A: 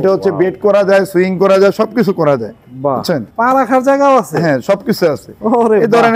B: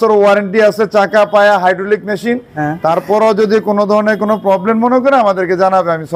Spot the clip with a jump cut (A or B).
A